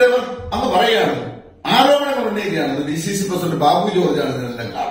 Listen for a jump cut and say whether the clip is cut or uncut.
uncut